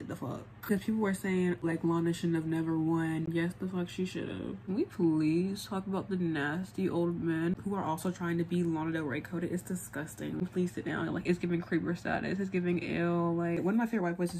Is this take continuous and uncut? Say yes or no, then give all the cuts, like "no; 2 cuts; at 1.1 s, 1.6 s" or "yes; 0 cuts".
no; 6 cuts; at 0.7 s, 1.6 s, 3.2 s, 4.6 s, 10.4 s, 13.6 s